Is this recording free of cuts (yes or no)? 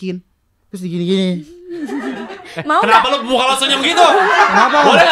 no